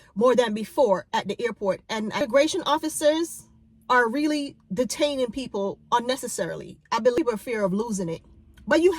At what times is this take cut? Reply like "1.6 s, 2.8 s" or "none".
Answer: 2.2 s, 7.2 s